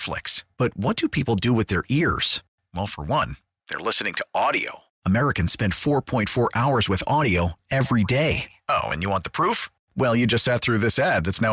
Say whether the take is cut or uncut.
uncut